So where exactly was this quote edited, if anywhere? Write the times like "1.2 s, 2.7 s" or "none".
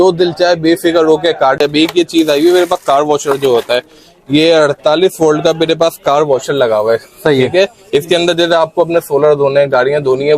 1.6 s